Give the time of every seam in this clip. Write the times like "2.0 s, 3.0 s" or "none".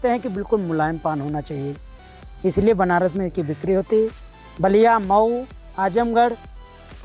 none